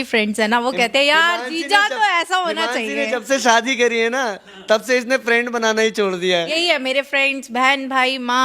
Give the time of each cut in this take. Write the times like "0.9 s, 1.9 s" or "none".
6.6 s

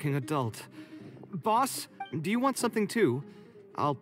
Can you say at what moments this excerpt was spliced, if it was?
2.1 s

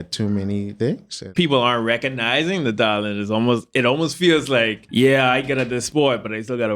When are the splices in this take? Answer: 1.3 s, 4.8 s

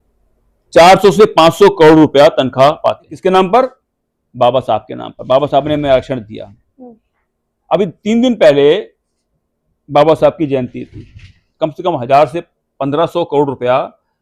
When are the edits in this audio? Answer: 3.1 s, 11.5 s

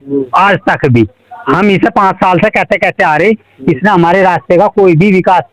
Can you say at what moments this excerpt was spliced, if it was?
none

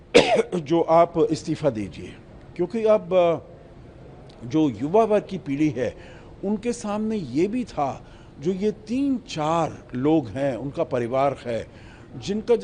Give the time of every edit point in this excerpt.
none

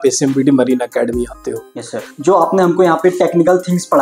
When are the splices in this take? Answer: 2.1 s

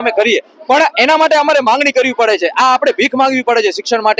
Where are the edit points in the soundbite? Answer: none

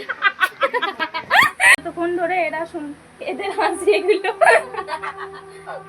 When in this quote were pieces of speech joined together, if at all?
1.9 s

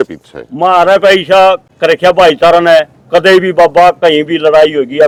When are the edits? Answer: none

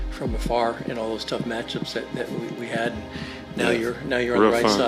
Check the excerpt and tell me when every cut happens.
none

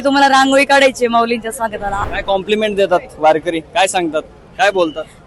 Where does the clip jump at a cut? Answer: 2.0 s

